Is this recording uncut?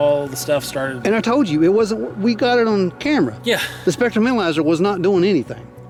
yes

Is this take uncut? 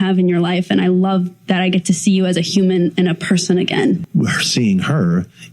no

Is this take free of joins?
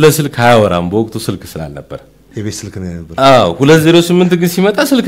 no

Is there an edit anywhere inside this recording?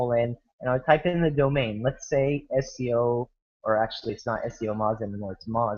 yes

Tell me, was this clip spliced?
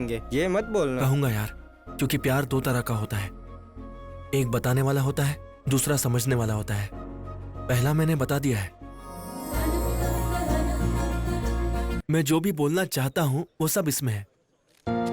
yes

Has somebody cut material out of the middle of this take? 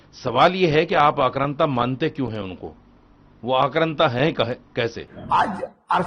yes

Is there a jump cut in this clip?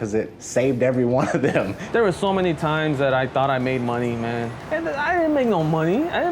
yes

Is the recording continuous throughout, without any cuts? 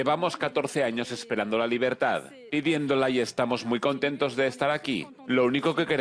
yes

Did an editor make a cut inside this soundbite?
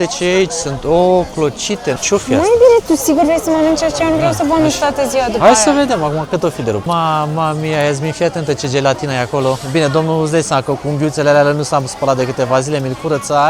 yes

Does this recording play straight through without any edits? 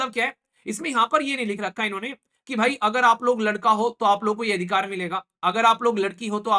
yes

